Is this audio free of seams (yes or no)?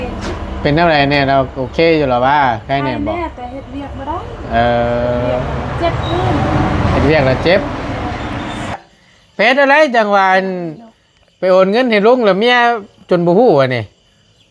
no